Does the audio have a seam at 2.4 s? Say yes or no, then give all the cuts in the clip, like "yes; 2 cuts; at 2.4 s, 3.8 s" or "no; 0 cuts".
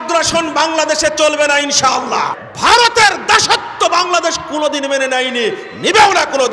yes; 1 cut; at 2.4 s